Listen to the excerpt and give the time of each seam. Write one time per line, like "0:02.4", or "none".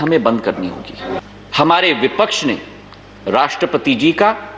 0:01.2

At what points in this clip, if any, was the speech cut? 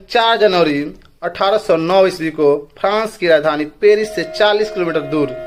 none

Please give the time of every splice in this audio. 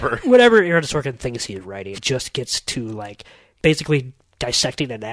0:02.0
0:03.4

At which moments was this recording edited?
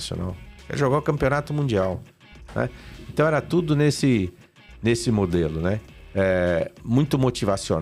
none

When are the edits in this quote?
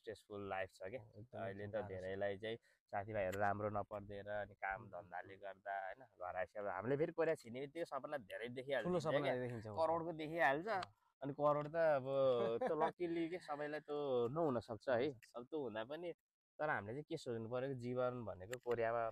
none

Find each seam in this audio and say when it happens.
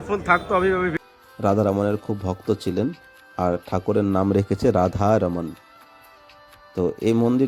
0:00.9

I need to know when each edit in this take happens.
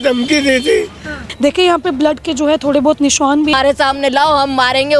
0:01.3
0:03.5

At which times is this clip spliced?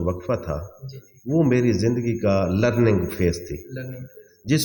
none

